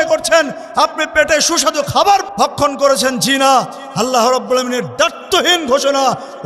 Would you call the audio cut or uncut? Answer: cut